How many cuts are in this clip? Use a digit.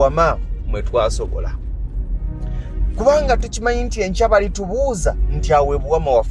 0